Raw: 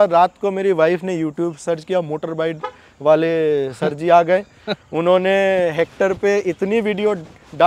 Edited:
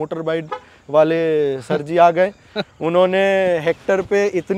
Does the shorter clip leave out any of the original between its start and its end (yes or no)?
no